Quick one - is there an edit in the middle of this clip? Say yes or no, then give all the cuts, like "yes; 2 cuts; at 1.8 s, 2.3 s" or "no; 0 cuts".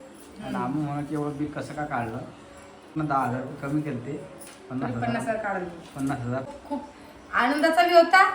yes; 2 cuts; at 2.9 s, 6.5 s